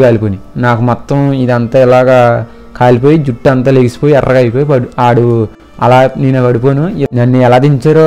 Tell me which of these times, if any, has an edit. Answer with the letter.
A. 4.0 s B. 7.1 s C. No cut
B